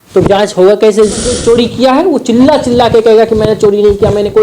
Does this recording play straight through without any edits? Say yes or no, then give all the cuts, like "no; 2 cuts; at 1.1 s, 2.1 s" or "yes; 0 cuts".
no; 1 cut; at 1.3 s